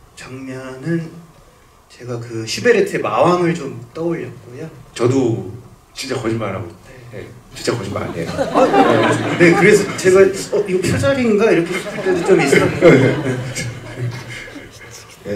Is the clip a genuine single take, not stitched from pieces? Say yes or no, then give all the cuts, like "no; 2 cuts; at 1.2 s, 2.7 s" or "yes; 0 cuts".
yes; 0 cuts